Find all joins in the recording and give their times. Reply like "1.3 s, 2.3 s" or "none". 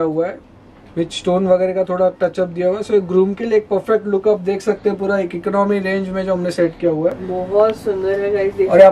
none